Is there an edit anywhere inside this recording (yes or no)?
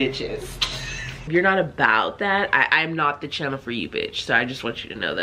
yes